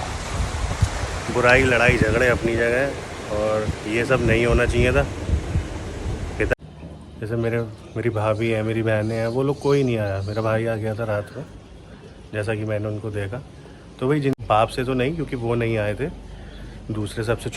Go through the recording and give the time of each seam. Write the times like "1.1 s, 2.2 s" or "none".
6.6 s, 14.4 s